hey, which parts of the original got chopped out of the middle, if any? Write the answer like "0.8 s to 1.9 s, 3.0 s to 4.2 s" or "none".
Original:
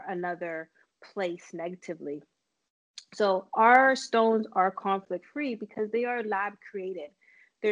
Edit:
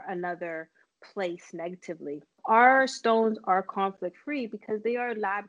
2.4 s to 3.5 s